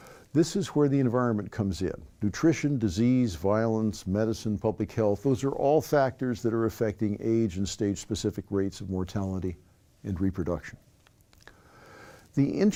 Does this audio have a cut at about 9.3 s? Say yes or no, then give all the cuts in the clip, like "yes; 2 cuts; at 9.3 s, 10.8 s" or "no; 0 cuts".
no; 0 cuts